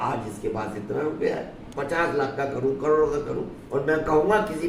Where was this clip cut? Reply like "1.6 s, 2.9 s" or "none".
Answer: 1.6 s, 3.6 s